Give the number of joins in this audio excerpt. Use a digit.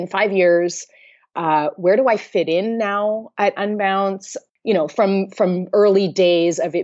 1